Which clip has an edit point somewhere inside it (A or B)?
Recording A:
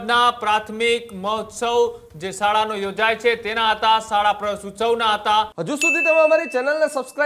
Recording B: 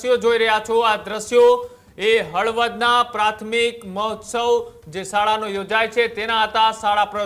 A